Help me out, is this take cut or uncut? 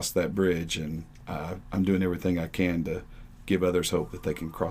uncut